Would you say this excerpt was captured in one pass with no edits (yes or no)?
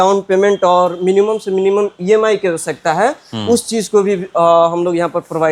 yes